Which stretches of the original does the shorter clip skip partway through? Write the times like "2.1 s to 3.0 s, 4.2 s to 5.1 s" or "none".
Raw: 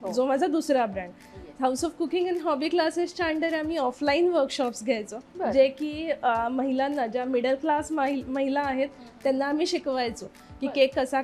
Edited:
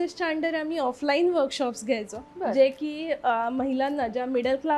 none